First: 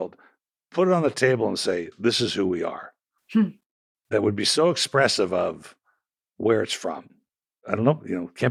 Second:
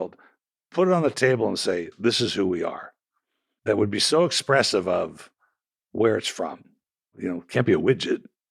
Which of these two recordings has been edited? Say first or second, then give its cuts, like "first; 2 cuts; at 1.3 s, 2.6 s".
second; 2 cuts; at 3.2 s, 7.2 s